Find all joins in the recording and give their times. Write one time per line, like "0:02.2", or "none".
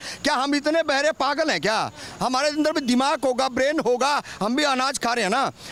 none